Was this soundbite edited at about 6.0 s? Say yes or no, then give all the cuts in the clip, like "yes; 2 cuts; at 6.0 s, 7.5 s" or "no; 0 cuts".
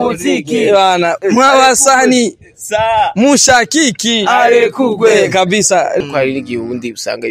yes; 1 cut; at 6.0 s